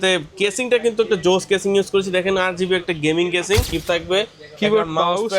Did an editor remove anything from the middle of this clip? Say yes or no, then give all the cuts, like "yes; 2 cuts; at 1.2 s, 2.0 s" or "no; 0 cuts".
yes; 1 cut; at 3.7 s